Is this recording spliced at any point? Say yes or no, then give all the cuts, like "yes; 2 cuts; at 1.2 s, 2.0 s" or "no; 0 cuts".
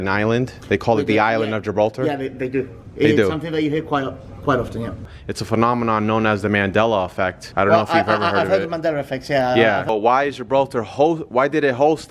yes; 3 cuts; at 5.0 s, 7.4 s, 9.9 s